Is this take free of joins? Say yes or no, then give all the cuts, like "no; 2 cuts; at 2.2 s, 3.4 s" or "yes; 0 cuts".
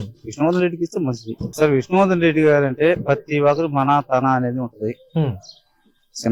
no; 1 cut; at 1.4 s